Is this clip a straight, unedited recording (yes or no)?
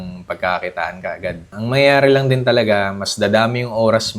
no